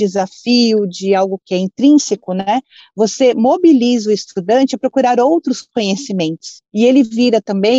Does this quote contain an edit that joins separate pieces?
yes; 1 cut; at 6.6 s

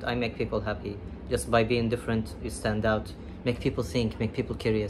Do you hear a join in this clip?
no; 0 cuts

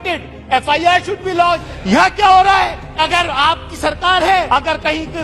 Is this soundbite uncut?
no; 3 cuts; at 1.7 s, 3.0 s, 4.5 s

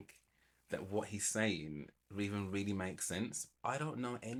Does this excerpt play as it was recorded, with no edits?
yes; 0 cuts

